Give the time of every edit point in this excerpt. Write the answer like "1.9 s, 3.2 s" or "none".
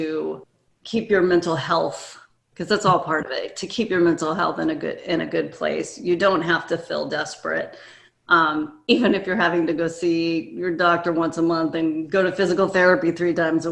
none

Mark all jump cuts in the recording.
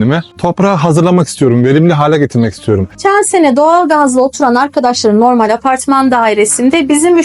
3.0 s

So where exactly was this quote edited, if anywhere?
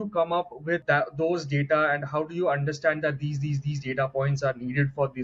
none

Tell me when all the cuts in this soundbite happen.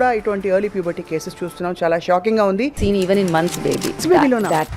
2.8 s, 4.0 s

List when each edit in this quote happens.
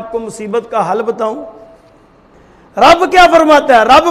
none

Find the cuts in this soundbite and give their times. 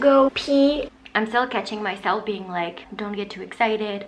0.8 s, 2.9 s

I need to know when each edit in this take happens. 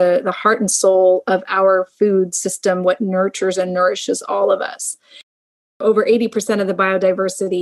5.4 s

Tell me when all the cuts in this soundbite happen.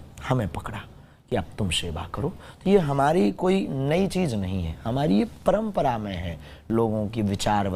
none

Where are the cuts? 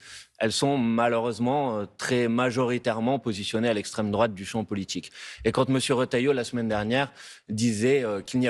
none

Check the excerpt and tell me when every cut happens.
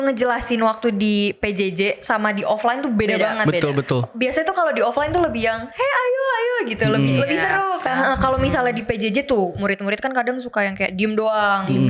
7.8 s

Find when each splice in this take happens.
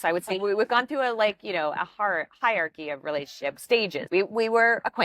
4.0 s

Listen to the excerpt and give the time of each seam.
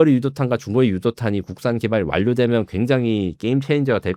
none

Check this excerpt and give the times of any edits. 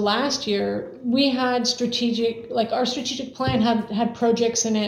none

